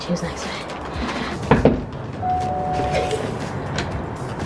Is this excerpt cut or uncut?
cut